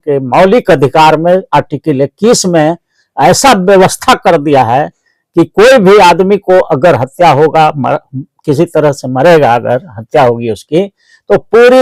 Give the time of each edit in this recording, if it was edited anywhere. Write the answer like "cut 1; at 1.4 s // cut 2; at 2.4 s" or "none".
none